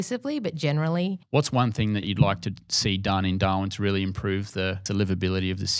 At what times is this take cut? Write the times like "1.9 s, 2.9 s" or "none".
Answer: 1.2 s, 2.0 s, 4.8 s